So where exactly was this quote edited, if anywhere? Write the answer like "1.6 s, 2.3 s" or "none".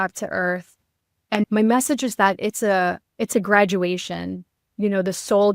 1.5 s